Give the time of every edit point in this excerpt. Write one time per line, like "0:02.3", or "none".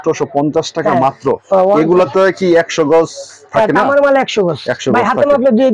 none

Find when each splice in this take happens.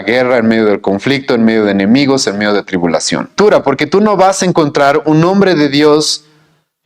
0:03.3

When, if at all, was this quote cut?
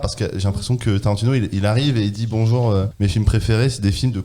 0:02.9

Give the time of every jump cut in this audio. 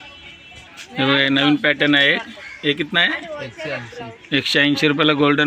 none

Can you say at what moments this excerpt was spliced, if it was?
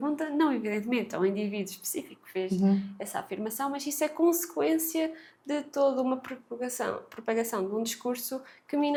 none

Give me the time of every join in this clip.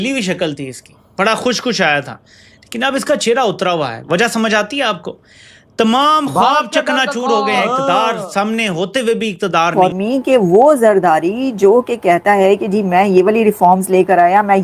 0:09.7

